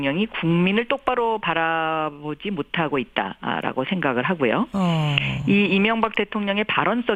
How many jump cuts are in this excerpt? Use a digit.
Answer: 0